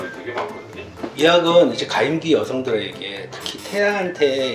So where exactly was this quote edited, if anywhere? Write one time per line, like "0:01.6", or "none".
0:01.1